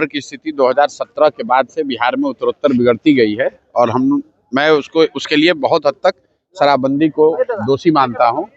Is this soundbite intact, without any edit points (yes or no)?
yes